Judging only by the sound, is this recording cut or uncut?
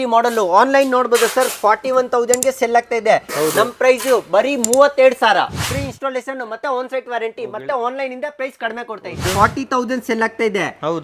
cut